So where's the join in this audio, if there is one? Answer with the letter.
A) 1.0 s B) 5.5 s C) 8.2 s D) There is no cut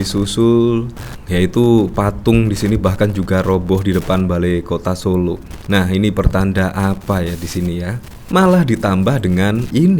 C